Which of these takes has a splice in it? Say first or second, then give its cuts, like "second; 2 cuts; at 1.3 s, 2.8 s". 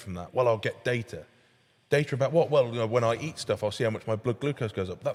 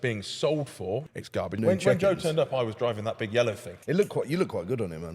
second; 2 cuts; at 1.5 s, 3.7 s